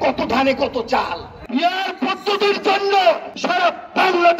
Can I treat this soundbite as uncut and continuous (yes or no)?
no